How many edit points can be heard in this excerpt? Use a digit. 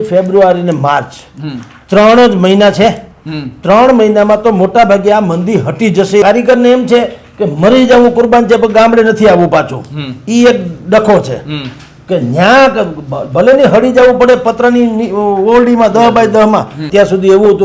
2